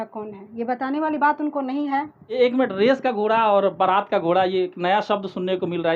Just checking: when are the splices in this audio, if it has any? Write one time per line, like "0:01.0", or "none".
0:02.2